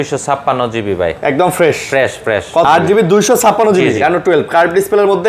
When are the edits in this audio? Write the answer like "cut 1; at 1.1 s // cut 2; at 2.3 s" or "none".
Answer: cut 1; at 2.6 s